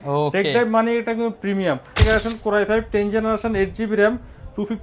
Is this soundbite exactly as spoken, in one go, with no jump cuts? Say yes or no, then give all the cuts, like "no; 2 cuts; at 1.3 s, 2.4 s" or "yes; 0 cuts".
no; 1 cut; at 2.0 s